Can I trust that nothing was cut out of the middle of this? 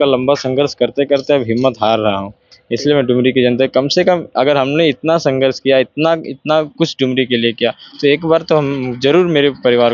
yes; 0 cuts

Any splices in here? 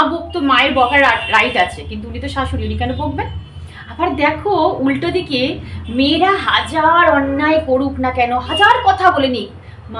no; 0 cuts

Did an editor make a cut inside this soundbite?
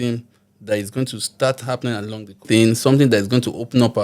yes; 1 cut; at 2.4 s

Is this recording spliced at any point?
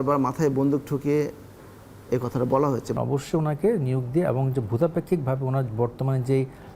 yes; 1 cut; at 3.0 s

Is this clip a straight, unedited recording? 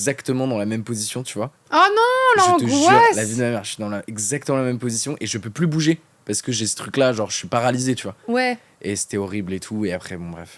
yes; 0 cuts

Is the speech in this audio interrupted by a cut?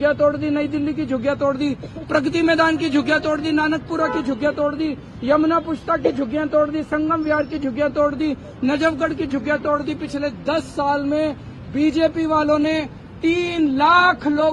no; 0 cuts

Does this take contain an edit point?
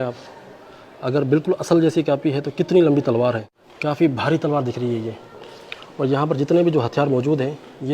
yes; 1 cut; at 3.8 s

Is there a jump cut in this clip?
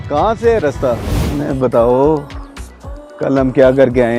yes; 1 cut; at 1.1 s

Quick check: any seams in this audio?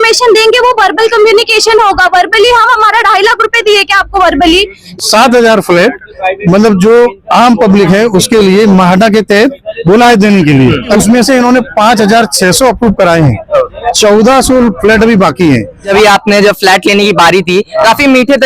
yes; 3 cuts; at 5.0 s, 10.9 s, 15.9 s

